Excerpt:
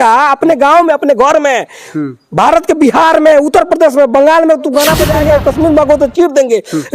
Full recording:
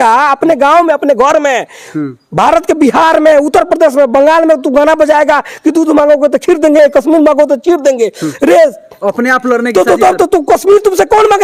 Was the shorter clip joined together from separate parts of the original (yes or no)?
yes